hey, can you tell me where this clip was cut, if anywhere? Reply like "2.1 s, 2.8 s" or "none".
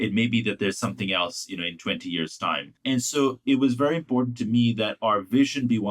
2.7 s